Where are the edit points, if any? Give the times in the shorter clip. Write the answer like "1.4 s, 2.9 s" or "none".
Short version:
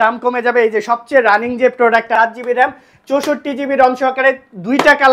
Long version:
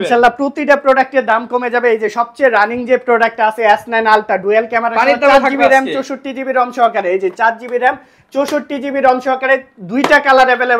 2.1 s